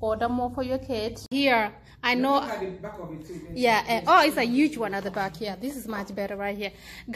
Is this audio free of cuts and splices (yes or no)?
no